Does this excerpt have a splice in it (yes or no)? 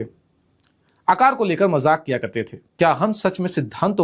yes